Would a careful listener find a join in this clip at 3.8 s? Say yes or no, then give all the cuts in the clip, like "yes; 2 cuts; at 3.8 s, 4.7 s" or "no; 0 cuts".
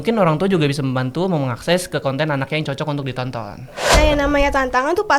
yes; 1 cut; at 3.8 s